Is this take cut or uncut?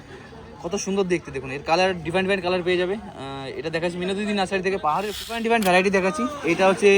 cut